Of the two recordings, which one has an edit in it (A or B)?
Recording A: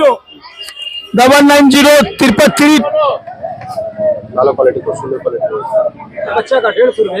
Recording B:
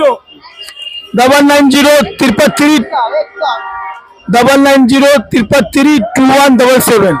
A